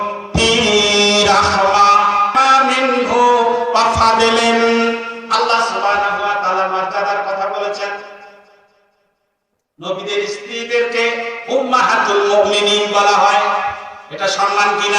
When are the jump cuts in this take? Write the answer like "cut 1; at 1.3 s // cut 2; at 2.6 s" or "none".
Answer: cut 1; at 2.3 s